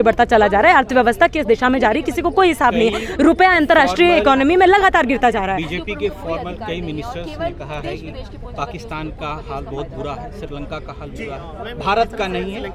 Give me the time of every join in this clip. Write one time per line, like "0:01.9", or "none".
none